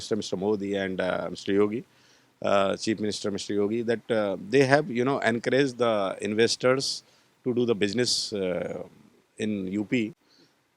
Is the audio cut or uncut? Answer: uncut